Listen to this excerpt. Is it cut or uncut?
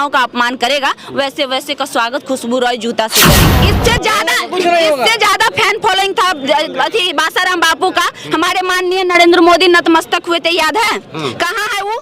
cut